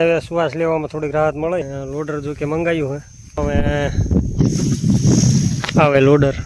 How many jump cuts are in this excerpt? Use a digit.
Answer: 2